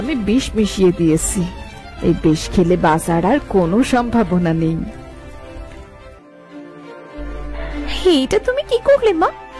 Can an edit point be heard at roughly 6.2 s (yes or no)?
yes